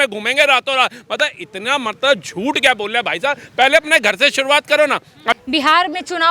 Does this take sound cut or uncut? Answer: cut